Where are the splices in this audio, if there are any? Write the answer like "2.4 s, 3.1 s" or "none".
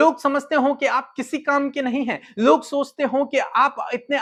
none